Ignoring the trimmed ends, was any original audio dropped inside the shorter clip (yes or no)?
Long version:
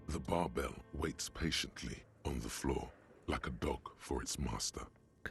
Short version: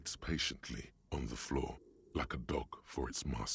no